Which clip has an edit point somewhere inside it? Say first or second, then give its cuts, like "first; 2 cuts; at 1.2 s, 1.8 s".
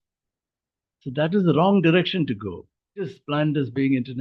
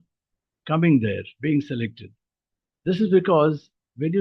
first; 1 cut; at 3.2 s